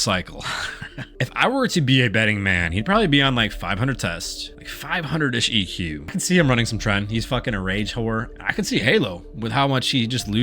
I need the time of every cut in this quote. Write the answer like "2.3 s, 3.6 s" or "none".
1.1 s, 6.2 s